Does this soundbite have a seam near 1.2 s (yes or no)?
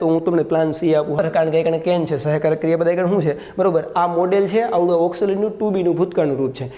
yes